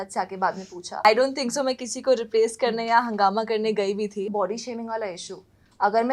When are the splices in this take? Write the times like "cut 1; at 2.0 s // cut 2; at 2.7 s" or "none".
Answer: cut 1; at 1.0 s // cut 2; at 4.3 s